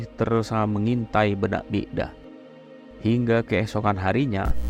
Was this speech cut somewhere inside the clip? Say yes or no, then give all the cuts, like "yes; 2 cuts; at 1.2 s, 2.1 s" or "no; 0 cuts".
no; 0 cuts